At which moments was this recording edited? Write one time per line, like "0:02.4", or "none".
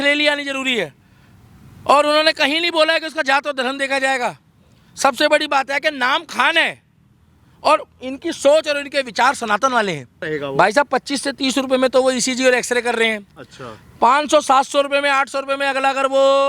0:10.1

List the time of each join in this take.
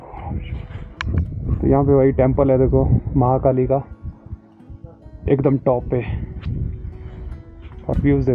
0:01.5

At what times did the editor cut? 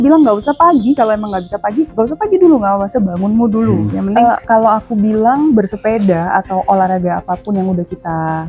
0:04.1

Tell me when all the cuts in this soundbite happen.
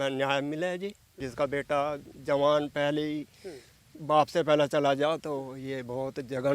0:01.2

